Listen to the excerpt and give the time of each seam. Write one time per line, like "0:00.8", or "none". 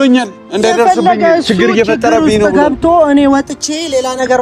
none